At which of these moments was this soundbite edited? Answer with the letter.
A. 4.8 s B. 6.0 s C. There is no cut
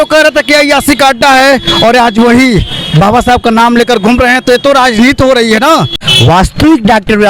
B